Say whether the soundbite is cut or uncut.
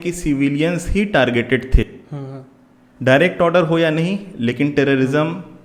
uncut